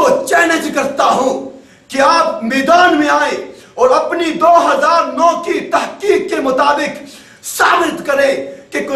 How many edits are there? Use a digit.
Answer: 0